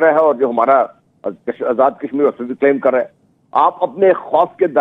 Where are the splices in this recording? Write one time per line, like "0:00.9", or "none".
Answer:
0:03.2